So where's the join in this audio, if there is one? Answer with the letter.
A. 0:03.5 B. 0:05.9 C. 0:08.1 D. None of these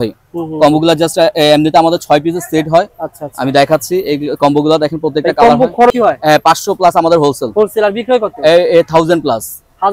B